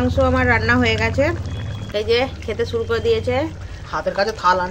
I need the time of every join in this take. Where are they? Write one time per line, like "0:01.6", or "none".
0:02.1